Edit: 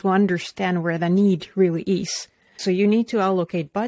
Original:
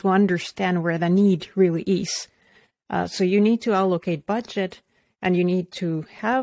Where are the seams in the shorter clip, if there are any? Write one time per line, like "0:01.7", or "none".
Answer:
0:02.6

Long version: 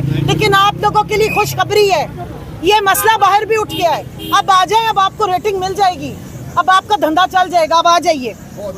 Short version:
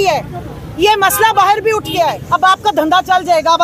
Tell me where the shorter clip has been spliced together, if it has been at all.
0:02.2

